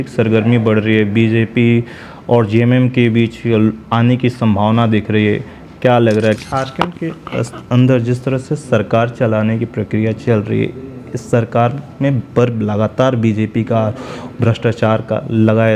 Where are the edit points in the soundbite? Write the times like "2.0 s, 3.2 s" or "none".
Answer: 6.4 s

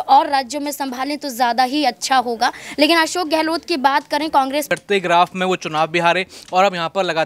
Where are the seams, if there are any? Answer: 4.7 s

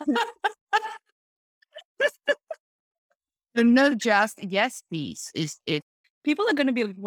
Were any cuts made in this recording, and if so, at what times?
6.0 s

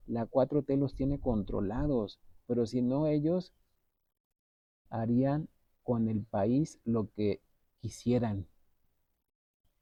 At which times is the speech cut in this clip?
none

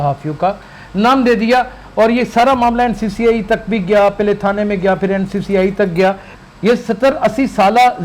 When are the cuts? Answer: 6.3 s

